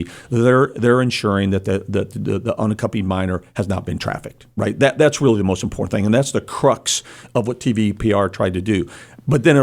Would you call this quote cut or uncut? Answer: uncut